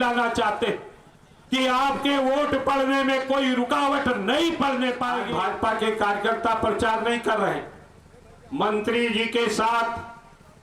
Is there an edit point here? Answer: yes; 1 cut; at 5.2 s

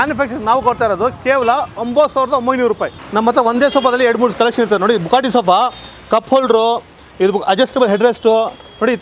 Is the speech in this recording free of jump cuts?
no; 1 cut; at 3.0 s

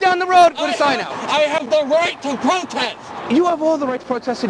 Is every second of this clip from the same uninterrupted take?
no; 2 cuts; at 1.1 s, 3.2 s

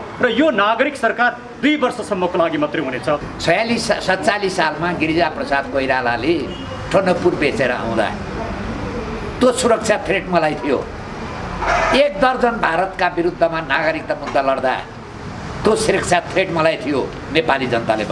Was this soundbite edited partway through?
yes; 1 cut; at 3.3 s

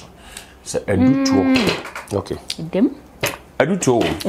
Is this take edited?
no; 0 cuts

